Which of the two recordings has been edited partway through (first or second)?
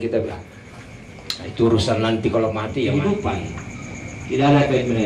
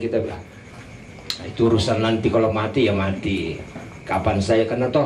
first